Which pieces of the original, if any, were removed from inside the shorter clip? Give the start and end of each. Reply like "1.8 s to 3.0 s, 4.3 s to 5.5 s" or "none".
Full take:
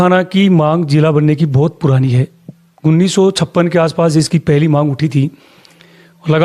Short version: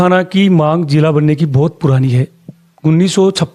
none